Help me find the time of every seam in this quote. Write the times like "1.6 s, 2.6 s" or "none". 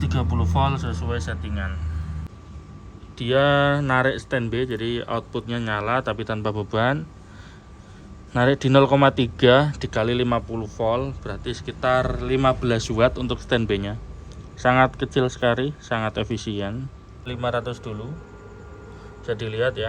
2.3 s, 17.3 s

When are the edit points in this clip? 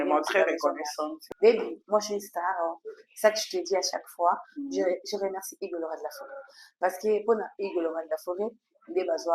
1.1 s

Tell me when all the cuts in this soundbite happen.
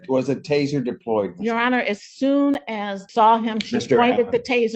3.0 s

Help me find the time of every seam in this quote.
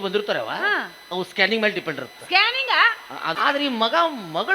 3.4 s

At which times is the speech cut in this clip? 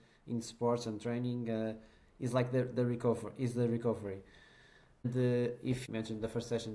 5.0 s, 5.8 s

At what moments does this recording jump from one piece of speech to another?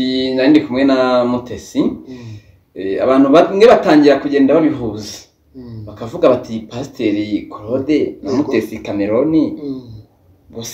none

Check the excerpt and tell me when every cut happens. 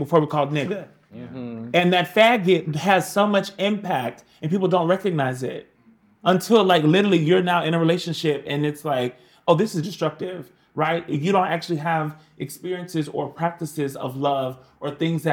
none

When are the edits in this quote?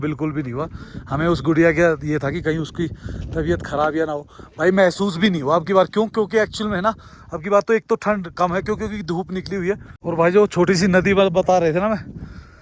9.9 s

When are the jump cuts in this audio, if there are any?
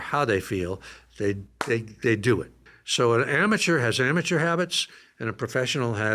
2.6 s

